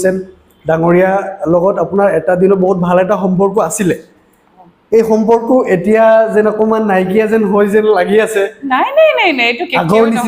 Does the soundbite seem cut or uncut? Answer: uncut